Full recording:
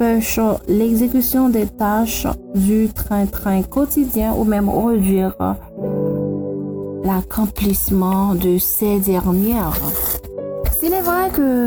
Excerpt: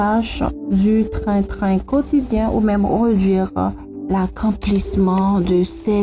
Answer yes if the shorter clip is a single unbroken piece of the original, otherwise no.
no